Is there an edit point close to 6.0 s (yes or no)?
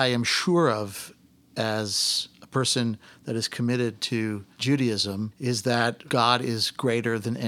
yes